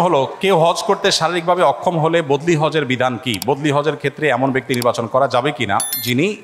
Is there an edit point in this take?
no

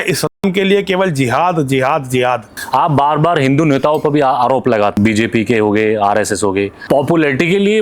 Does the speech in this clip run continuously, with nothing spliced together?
no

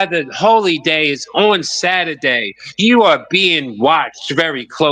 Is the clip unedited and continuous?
yes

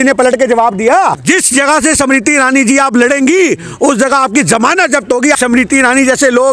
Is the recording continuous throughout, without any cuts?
no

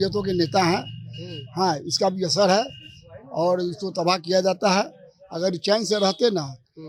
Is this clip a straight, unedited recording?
yes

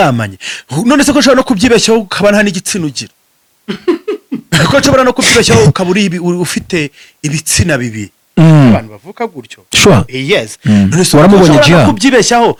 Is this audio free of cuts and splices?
yes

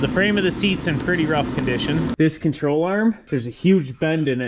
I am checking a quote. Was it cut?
yes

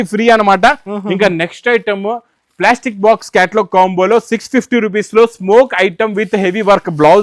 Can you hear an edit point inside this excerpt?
no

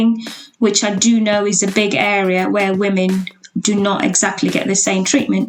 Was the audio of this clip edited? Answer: no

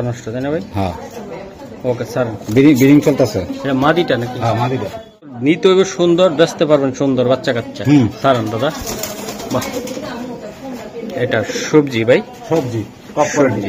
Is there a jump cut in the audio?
yes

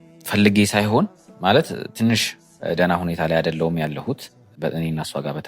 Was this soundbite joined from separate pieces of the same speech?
yes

